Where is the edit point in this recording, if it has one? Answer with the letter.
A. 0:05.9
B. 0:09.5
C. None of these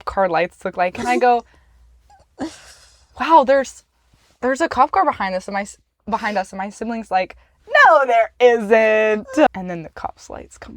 B